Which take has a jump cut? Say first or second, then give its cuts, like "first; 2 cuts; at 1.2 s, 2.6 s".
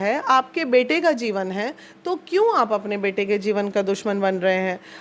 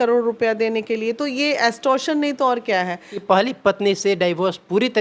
second; 1 cut; at 3.1 s